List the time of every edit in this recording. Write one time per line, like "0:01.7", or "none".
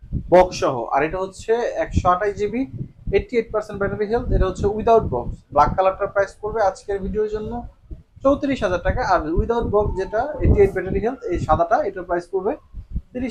none